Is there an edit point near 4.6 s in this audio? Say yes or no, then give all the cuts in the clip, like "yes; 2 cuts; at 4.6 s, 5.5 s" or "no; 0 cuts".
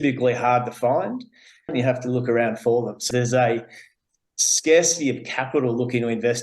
no; 2 cuts; at 1.7 s, 3.1 s